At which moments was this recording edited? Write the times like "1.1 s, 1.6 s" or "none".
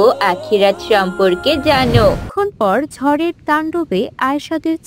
2.3 s